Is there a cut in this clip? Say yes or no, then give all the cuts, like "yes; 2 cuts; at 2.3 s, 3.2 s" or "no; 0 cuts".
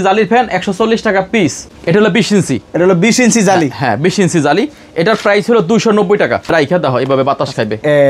yes; 2 cuts; at 1.7 s, 6.5 s